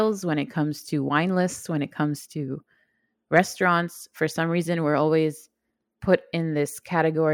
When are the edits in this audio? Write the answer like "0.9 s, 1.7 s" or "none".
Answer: none